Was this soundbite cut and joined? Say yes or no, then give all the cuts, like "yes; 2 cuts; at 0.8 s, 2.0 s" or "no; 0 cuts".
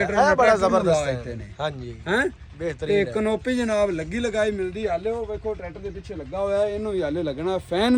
no; 0 cuts